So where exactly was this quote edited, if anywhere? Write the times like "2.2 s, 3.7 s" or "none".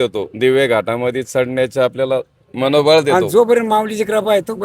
3.1 s